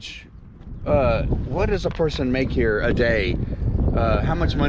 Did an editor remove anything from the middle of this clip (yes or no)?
no